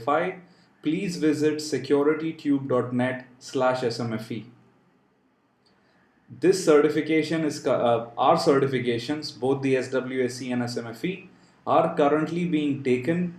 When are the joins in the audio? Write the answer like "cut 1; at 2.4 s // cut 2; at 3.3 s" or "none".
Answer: none